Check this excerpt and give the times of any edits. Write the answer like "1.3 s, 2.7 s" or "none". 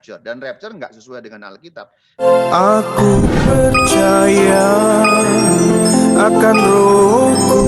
2.0 s

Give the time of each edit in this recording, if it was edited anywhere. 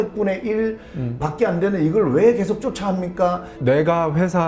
3.5 s

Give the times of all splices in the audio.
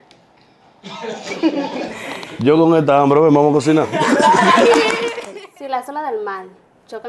5.0 s

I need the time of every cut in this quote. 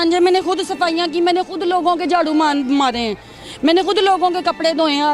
none

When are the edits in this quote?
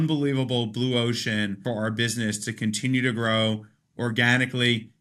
1.6 s

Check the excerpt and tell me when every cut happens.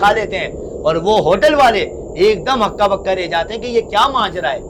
none

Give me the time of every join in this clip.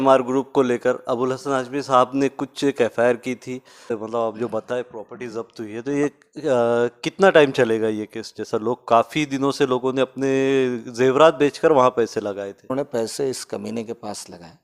3.9 s, 12.6 s

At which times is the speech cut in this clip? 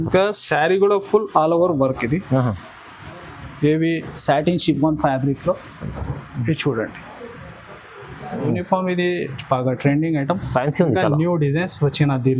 8.4 s

